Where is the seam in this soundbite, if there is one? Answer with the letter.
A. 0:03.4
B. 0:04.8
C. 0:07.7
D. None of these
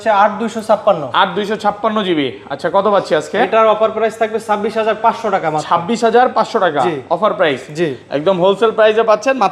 D